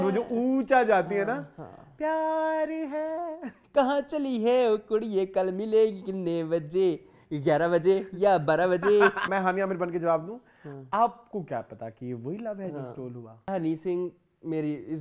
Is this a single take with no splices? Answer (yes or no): no